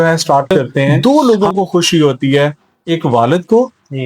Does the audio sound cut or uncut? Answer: cut